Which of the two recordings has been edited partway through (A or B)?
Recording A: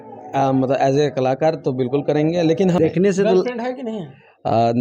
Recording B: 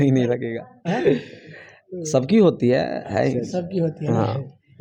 A